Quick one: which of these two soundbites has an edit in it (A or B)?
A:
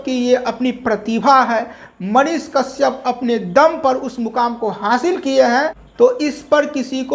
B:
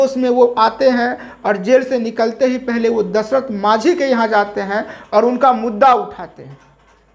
A